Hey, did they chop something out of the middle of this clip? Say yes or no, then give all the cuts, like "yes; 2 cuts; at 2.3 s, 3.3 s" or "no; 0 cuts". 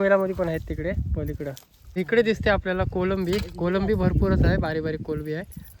yes; 1 cut; at 1.7 s